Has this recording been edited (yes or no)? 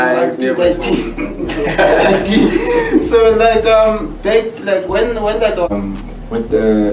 yes